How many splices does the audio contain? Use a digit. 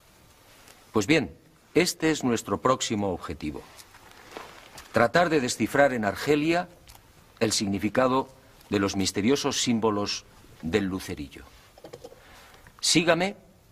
0